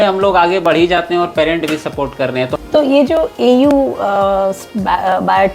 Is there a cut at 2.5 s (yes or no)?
yes